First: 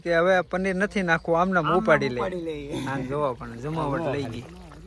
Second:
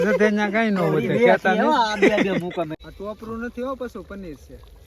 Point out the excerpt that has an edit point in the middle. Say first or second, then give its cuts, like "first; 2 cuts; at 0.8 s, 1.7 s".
second; 1 cut; at 2.7 s